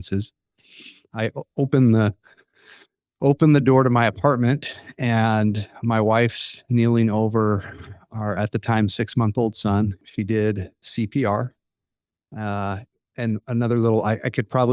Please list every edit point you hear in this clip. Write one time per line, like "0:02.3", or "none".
0:10.1

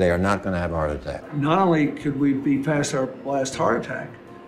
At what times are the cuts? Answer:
0:01.2

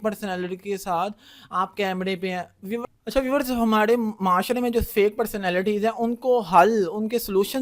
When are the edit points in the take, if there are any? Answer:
0:02.8

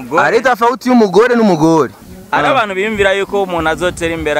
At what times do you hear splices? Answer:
0:02.1

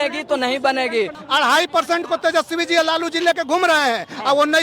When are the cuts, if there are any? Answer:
0:01.2

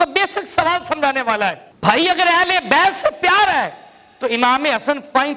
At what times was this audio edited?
none

